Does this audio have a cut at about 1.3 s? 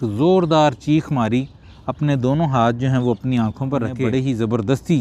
no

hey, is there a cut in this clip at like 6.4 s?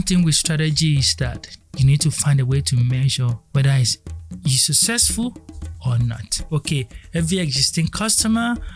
yes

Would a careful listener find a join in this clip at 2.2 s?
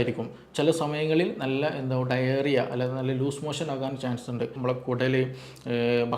no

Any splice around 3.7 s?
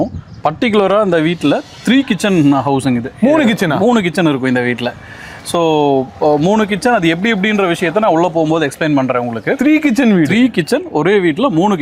no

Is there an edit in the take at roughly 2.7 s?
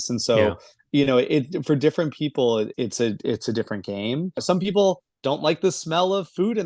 yes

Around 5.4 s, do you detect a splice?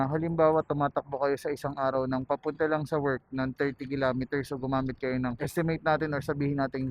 yes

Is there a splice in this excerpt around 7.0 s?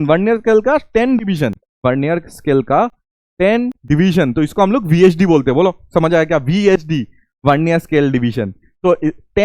no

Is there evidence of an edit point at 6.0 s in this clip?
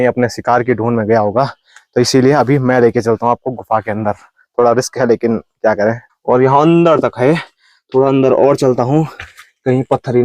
yes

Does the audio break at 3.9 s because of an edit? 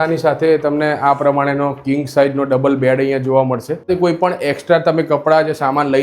yes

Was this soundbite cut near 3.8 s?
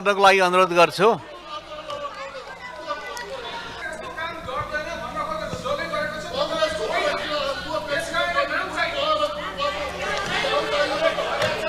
yes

